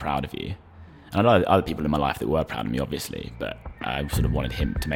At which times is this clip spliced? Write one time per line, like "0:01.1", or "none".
none